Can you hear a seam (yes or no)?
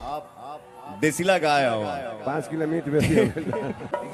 no